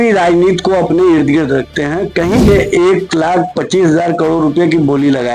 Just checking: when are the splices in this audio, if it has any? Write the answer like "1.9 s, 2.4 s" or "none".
2.5 s

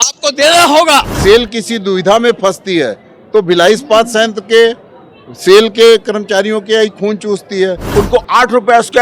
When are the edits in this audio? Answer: 1.1 s, 7.8 s

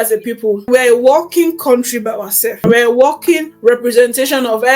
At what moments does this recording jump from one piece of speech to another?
2.6 s, 3.5 s

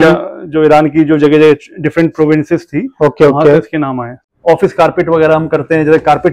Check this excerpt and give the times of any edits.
4.3 s

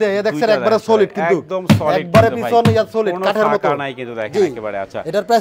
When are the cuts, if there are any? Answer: none

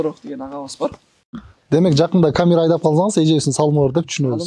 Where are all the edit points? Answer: 1.5 s

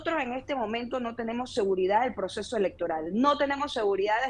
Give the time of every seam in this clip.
none

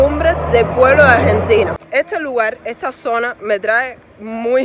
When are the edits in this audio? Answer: 1.8 s

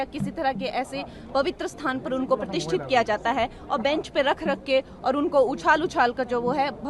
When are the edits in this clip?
none

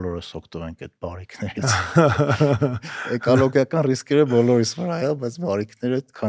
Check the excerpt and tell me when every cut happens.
none

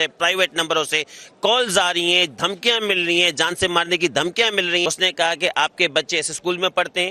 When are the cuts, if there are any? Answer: 4.8 s

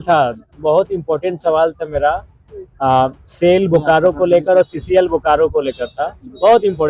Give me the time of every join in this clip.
none

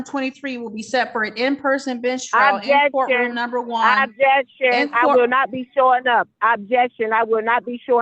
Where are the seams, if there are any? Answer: none

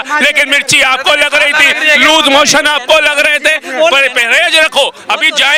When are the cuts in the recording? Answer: none

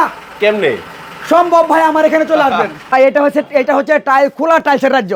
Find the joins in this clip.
2.9 s

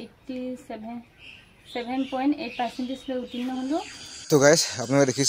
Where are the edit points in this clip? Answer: 4.2 s

